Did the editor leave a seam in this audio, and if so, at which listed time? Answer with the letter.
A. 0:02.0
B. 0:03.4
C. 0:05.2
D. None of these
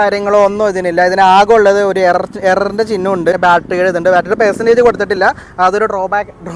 B